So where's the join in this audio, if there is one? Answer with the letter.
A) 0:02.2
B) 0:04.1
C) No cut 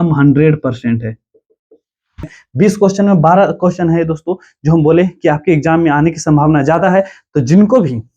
A